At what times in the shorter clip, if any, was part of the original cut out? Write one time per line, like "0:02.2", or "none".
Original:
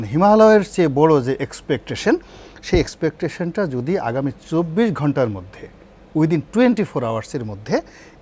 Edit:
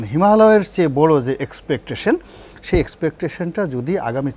none